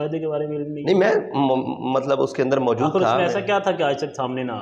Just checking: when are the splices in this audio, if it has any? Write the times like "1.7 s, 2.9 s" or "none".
none